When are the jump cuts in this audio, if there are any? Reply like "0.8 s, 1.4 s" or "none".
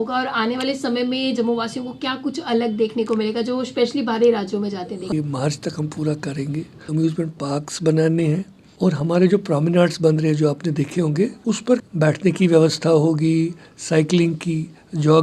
5.1 s, 6.9 s, 8.6 s, 11.4 s